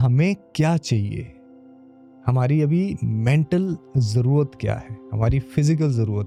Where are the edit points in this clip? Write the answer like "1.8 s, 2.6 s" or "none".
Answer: none